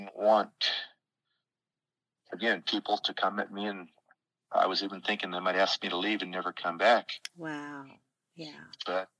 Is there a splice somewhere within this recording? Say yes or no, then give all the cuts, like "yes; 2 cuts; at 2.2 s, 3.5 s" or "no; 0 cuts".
no; 0 cuts